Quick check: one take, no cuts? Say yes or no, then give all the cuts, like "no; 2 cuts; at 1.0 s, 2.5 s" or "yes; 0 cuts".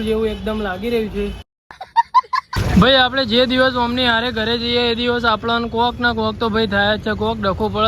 no; 1 cut; at 2.6 s